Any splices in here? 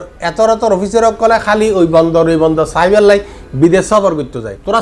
no; 0 cuts

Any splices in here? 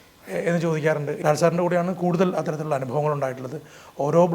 yes; 1 cut; at 1.2 s

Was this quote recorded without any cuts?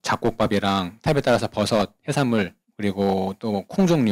no; 1 cut; at 2.6 s

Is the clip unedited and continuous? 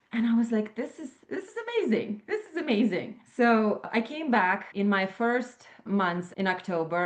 no; 4 cuts; at 3.2 s, 3.8 s, 4.7 s, 5.8 s

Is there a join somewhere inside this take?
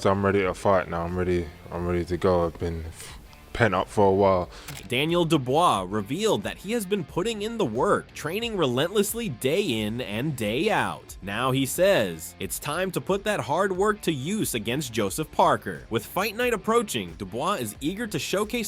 no; 0 cuts

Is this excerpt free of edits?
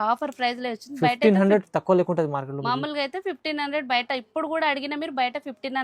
yes; 0 cuts

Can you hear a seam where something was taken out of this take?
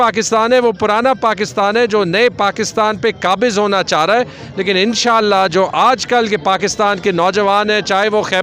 no; 0 cuts

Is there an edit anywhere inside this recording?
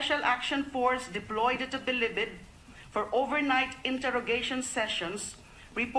yes; 1 cut; at 3.8 s

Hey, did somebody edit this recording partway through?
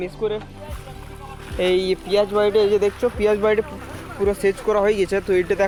no; 0 cuts

